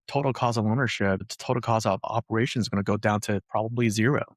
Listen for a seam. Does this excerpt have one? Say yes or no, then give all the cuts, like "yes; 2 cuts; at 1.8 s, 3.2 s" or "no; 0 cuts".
yes; 1 cut; at 1.3 s